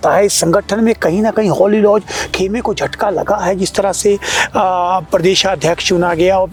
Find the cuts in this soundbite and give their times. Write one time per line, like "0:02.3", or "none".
none